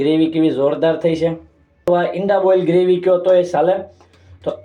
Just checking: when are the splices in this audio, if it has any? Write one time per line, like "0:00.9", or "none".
0:01.8